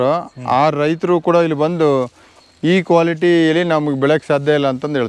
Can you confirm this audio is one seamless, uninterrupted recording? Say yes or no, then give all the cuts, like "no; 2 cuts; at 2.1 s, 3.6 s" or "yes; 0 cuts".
yes; 0 cuts